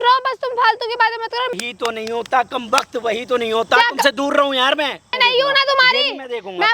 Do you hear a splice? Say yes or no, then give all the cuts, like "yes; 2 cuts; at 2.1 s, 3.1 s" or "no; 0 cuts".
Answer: yes; 2 cuts; at 1.5 s, 5.0 s